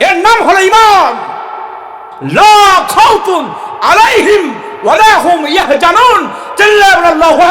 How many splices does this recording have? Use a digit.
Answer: 1